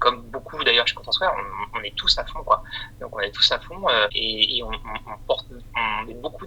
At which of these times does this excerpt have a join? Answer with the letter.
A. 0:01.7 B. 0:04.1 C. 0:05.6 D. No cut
B